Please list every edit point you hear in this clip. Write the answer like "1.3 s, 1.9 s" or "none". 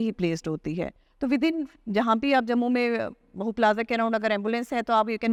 none